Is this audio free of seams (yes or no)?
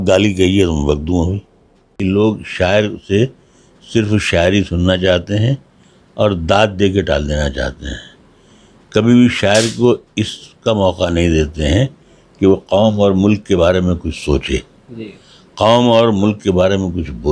no